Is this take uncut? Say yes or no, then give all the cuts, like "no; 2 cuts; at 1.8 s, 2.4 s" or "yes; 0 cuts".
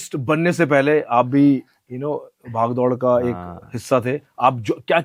yes; 0 cuts